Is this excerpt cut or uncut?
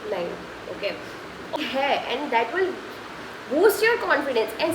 cut